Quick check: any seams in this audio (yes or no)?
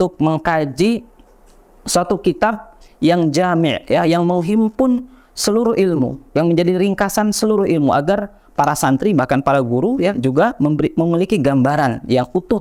no